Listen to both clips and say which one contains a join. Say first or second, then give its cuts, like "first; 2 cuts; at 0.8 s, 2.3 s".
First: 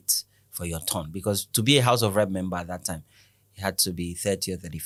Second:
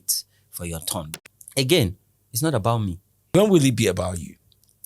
second; 2 cuts; at 1.1 s, 3.1 s